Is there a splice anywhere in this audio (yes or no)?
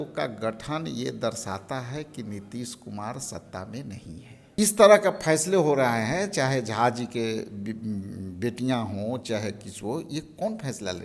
yes